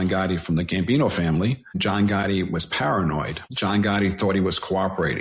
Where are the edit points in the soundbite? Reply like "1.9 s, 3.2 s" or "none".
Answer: 1.8 s, 3.4 s